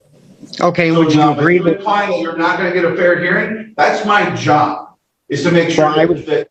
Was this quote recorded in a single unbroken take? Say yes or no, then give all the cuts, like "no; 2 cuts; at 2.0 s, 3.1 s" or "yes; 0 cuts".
yes; 0 cuts